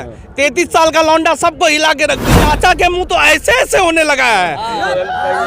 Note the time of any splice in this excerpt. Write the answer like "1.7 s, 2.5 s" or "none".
2.3 s